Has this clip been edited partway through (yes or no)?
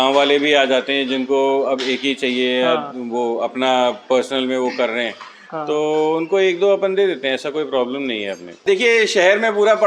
yes